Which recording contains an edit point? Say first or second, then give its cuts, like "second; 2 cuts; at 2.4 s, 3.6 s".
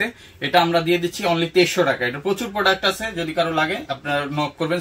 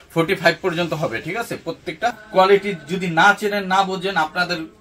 second; 1 cut; at 2.2 s